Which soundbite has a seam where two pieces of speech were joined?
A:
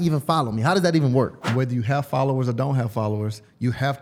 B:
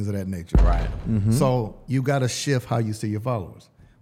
A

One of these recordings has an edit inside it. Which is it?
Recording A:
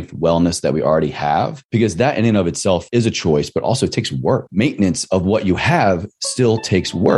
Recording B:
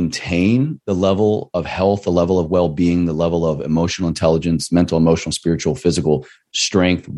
A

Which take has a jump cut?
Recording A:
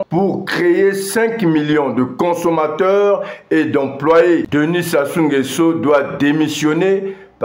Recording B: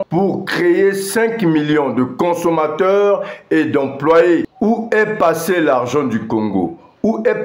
A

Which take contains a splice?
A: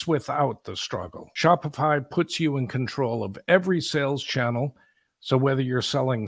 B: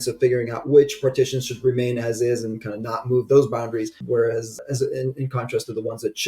B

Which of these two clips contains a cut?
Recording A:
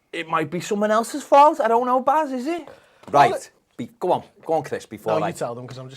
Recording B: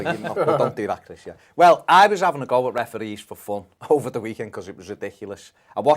A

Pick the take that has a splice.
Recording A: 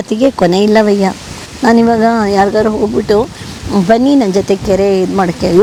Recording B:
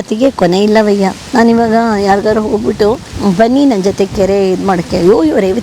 B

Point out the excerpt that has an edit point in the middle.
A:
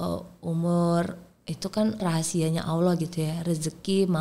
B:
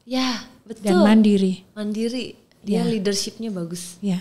A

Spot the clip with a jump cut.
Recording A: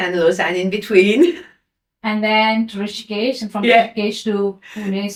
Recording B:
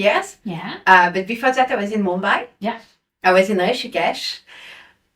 B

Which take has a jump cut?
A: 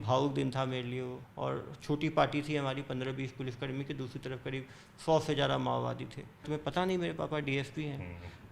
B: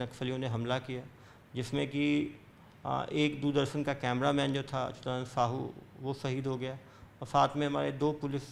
A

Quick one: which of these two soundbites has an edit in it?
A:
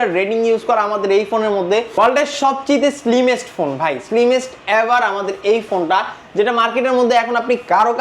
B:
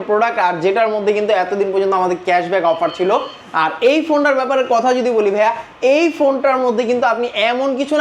A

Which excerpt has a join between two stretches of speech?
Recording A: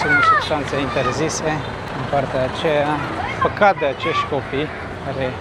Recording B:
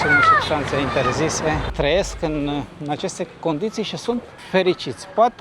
B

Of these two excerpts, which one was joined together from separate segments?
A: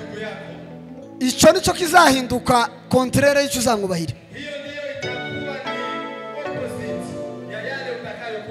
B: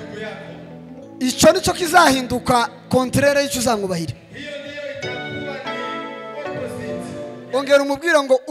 B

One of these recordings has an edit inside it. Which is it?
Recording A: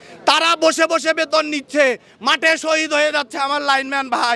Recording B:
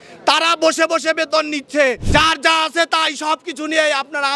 B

